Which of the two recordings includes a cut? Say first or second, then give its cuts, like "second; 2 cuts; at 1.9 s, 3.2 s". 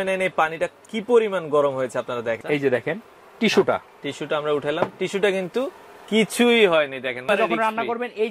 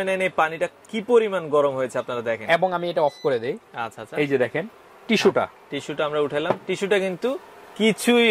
first; 2 cuts; at 2.4 s, 7.2 s